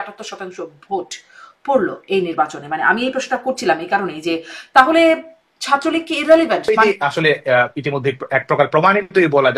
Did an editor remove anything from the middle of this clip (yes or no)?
yes